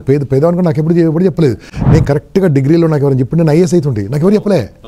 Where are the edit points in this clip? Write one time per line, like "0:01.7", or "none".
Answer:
none